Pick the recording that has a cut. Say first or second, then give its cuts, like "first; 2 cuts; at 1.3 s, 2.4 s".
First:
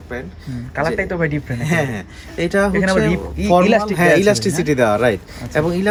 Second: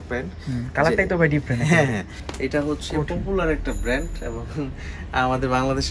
second; 1 cut; at 2.2 s